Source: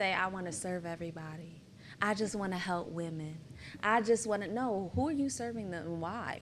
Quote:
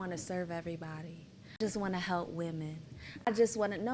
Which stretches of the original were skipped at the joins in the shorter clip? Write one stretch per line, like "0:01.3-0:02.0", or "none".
0:01.9-0:02.2
0:03.9-0:04.0